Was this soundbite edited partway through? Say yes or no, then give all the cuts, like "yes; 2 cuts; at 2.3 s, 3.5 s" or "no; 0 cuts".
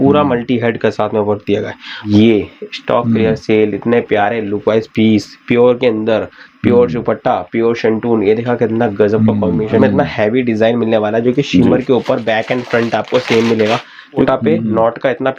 yes; 3 cuts; at 2.0 s, 9.8 s, 14.3 s